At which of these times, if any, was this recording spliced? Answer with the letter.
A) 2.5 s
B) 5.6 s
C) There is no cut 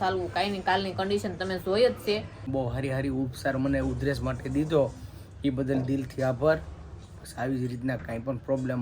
A